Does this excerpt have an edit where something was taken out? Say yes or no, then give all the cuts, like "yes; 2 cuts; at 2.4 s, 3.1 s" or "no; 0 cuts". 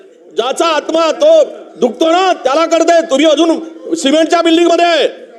no; 0 cuts